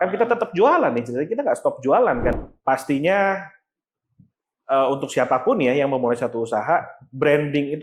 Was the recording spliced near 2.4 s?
yes; 1 cut; at 2.4 s

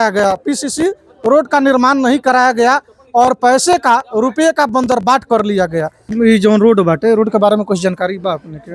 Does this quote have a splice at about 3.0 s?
no; 1 cut; at 6.0 s

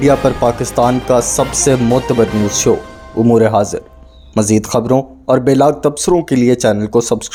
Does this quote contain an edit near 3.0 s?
no; 0 cuts

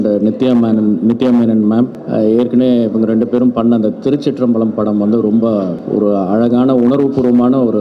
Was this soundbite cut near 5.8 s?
yes; 2 cuts; at 2.0 s, 5.8 s

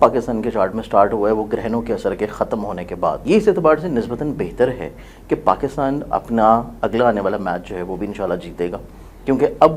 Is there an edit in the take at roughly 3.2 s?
yes; 1 cut; at 3.2 s

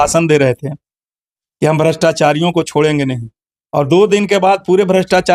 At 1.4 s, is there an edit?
no; 0 cuts

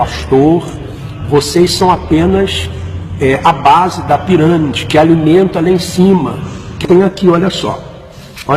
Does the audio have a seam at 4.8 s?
no; 0 cuts

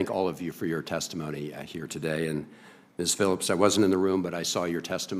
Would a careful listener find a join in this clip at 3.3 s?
yes; 1 cut; at 3.3 s

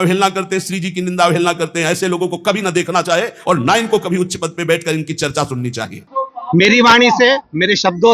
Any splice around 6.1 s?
yes; 1 cut; at 6.1 s

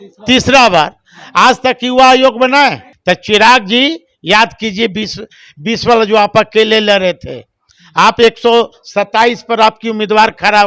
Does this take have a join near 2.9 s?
yes; 1 cut; at 2.9 s

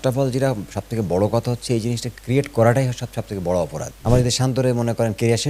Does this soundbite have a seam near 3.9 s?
yes; 1 cut; at 3.9 s

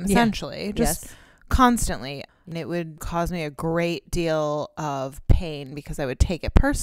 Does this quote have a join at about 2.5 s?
yes; 1 cut; at 2.5 s

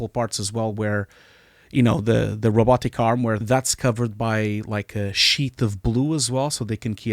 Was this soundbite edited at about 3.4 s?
yes; 1 cut; at 3.4 s

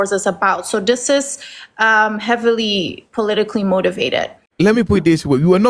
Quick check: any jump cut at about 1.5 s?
no; 1 cut; at 4.4 s

